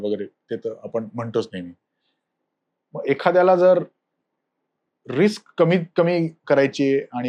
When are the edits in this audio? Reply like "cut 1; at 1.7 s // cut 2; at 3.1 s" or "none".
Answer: none